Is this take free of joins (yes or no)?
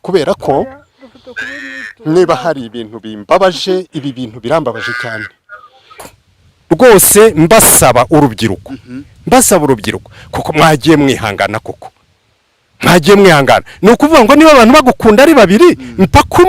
no